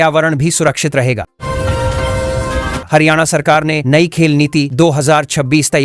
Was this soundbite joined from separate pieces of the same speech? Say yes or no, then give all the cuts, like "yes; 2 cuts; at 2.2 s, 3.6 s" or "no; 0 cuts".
no; 0 cuts